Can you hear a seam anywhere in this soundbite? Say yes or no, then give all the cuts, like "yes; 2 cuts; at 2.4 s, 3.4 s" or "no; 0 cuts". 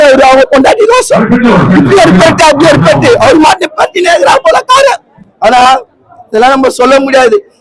no; 0 cuts